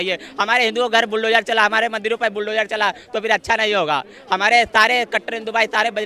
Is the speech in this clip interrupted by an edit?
no; 0 cuts

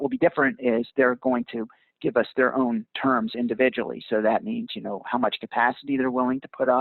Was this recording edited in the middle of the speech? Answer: no; 0 cuts

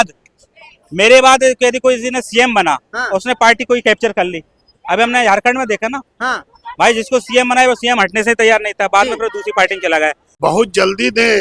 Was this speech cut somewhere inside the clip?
yes; 1 cut; at 10.3 s

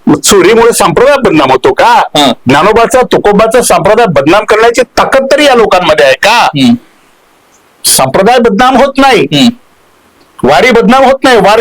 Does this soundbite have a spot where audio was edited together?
no; 0 cuts

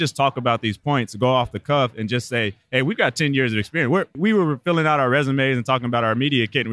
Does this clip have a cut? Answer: no; 0 cuts

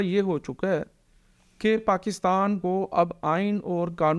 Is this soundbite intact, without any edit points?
yes; 0 cuts

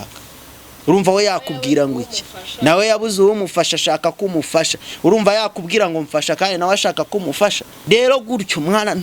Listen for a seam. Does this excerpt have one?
yes; 1 cut; at 7.7 s

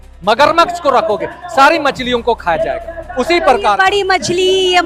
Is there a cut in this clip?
no; 0 cuts

